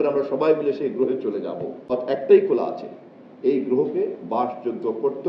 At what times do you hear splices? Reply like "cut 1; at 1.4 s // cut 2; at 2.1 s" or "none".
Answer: cut 1; at 1.9 s